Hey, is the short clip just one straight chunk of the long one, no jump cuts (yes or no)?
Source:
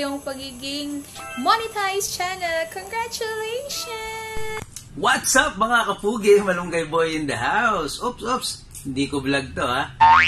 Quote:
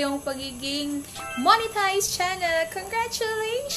yes